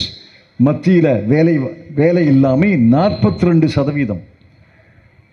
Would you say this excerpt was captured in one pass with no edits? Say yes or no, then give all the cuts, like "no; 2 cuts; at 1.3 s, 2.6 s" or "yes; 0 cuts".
yes; 0 cuts